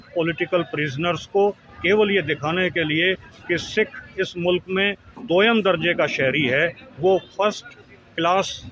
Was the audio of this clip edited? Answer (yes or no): no